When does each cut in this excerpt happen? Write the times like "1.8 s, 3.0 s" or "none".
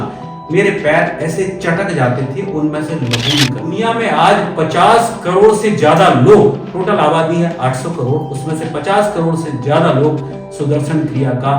3.7 s